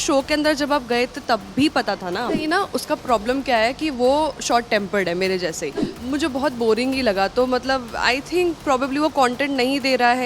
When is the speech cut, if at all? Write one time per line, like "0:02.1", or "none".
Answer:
0:02.4
0:05.9